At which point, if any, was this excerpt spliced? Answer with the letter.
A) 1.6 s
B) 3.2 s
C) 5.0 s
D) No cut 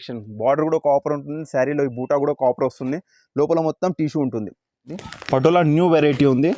C